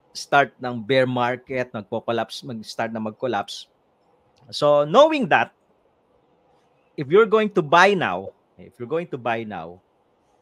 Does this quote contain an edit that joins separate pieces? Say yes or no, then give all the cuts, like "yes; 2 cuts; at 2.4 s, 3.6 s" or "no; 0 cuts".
no; 0 cuts